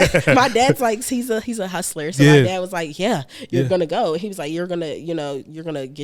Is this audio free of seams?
yes; 0 cuts

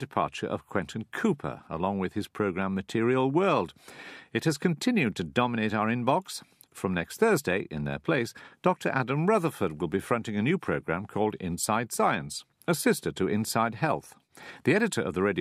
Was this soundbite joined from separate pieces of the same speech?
no; 0 cuts

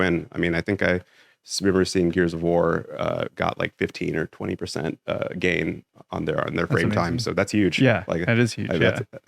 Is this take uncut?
yes; 0 cuts

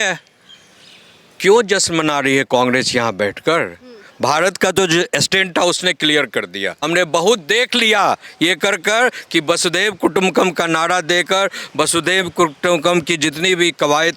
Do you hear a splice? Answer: yes; 1 cut; at 6.8 s

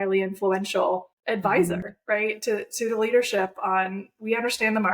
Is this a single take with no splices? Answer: no; 1 cut; at 1.1 s

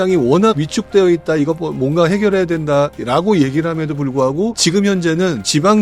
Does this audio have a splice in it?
no; 0 cuts

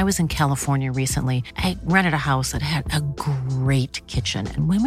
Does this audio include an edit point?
no; 0 cuts

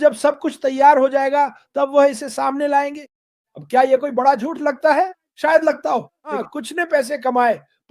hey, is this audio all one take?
no; 1 cut; at 6.5 s

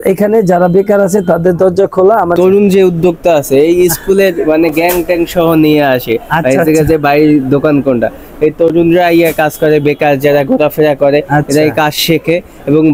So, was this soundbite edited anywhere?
yes; 1 cut; at 2.4 s

